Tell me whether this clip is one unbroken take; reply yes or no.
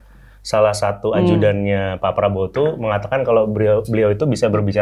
yes